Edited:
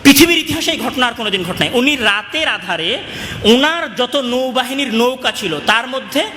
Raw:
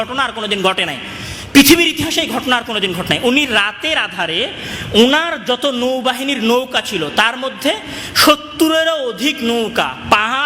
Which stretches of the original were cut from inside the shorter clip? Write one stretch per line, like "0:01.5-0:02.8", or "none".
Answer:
none